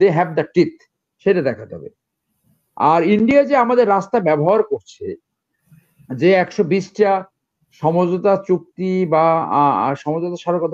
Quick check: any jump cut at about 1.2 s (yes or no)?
no